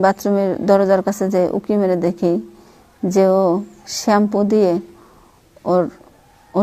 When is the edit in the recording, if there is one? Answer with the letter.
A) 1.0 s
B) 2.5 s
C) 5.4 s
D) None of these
D